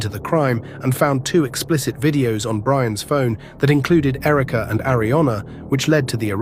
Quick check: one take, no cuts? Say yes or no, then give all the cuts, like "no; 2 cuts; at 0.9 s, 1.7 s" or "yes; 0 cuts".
yes; 0 cuts